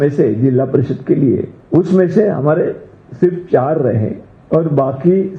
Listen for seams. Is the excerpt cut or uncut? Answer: cut